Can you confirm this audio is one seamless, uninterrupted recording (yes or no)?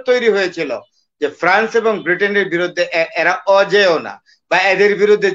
yes